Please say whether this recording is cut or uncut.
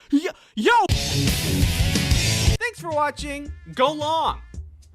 cut